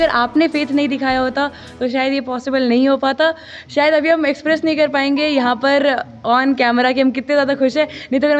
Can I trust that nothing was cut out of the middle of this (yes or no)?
yes